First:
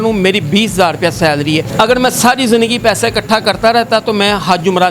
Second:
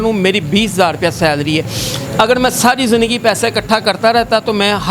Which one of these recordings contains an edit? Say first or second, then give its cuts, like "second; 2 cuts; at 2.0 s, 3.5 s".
first; 1 cut; at 1.7 s